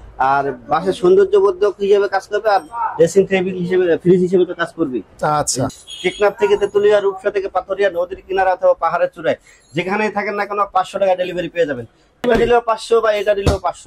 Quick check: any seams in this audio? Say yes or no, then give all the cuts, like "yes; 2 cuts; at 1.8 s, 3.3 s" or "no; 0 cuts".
yes; 2 cuts; at 5.7 s, 12.3 s